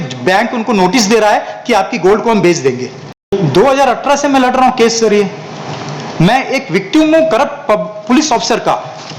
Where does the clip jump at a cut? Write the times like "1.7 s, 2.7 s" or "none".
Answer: 3.3 s